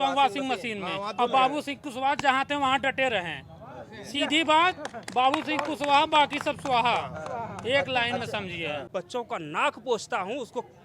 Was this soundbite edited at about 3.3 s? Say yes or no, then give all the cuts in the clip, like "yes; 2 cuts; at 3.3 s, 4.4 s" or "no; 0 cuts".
no; 1 cut; at 8.8 s